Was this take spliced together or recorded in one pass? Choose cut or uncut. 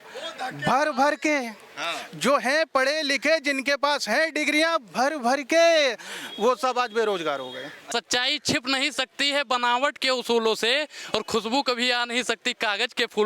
cut